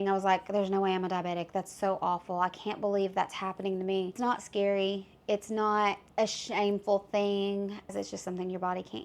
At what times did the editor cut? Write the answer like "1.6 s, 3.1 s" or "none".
4.2 s, 6.0 s, 7.9 s